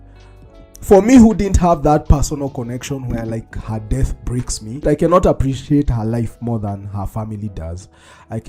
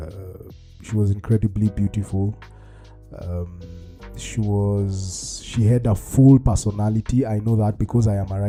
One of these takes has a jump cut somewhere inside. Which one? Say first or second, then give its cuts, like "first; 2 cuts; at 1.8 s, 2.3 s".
first; 1 cut; at 4.8 s